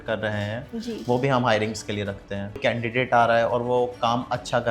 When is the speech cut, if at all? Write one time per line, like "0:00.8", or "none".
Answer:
0:02.6